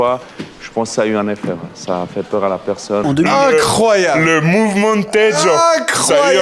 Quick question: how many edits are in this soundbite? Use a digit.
1